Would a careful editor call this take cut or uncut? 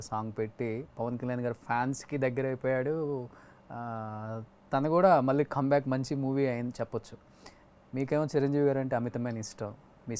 uncut